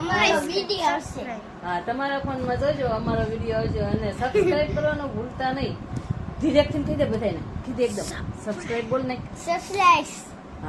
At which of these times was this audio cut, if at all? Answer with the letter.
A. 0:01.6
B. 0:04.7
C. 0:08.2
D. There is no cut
D